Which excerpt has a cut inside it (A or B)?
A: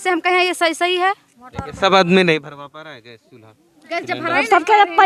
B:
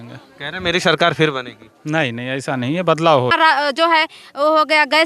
B